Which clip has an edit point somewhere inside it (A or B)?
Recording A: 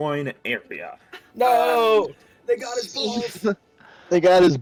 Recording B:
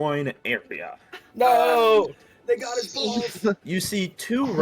B